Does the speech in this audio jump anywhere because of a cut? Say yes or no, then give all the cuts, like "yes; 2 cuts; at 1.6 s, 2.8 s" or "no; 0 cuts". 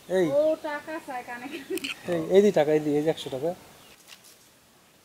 no; 0 cuts